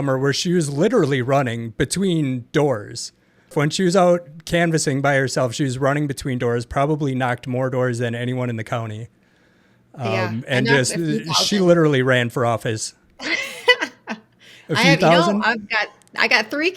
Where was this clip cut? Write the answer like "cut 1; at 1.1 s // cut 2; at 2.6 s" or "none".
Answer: cut 1; at 3.5 s